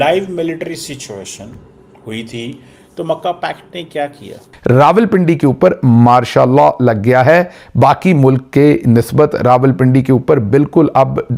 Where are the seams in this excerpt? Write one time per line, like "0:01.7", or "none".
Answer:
0:04.5